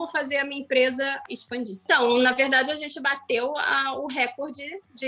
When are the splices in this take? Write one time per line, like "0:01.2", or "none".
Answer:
0:01.8